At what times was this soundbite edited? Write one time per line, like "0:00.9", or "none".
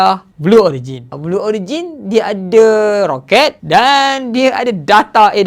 0:03.6